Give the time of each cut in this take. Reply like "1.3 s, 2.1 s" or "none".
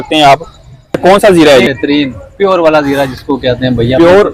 1.0 s